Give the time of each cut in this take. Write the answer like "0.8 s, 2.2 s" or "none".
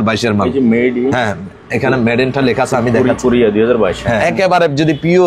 4.2 s